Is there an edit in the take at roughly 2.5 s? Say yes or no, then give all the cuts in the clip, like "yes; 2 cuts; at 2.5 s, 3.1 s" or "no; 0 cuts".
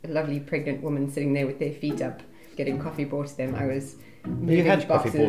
yes; 1 cut; at 2.5 s